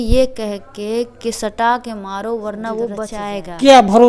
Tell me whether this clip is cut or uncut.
cut